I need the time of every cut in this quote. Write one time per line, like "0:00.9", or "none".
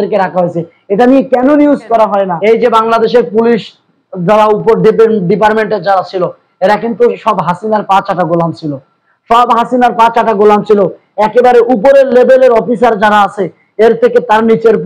0:02.3